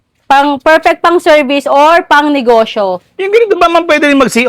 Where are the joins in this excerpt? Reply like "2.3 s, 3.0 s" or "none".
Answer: none